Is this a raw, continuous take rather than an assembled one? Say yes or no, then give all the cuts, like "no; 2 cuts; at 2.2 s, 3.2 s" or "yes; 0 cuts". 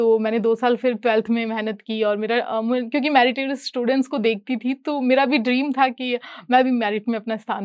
yes; 0 cuts